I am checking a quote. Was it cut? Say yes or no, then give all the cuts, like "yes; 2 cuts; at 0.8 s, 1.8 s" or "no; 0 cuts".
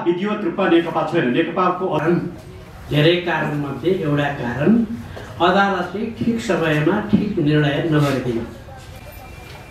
yes; 1 cut; at 2.0 s